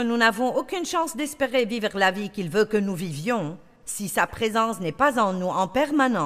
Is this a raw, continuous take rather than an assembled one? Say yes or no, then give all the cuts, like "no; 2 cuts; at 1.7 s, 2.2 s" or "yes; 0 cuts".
yes; 0 cuts